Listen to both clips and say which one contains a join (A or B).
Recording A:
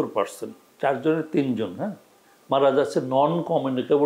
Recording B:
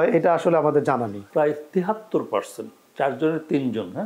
B